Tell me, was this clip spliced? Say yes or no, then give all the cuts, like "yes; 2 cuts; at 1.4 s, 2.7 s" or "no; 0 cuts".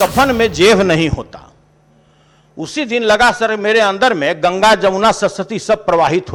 no; 0 cuts